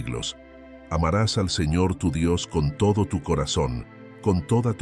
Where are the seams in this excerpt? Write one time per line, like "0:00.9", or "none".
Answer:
none